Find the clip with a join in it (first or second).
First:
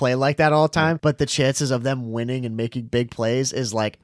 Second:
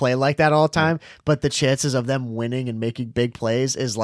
first